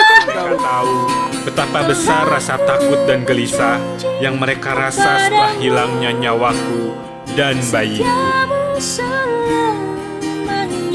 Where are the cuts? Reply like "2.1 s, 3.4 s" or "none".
1.3 s